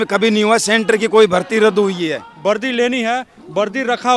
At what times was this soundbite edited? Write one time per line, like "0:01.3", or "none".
0:02.3